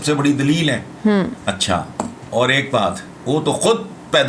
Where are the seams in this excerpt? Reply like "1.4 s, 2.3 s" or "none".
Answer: 2.2 s, 3.1 s